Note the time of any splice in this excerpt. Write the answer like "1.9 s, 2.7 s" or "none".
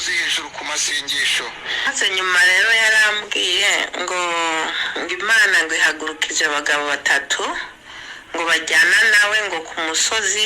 1.9 s